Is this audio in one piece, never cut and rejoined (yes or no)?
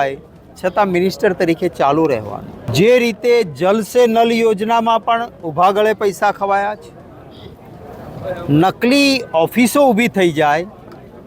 no